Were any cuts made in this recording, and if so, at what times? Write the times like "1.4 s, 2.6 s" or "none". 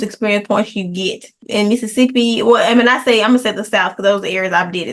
1.4 s